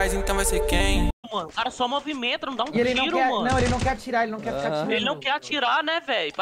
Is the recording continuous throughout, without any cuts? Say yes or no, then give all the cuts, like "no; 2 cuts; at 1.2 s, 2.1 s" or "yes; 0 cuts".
no; 1 cut; at 1.1 s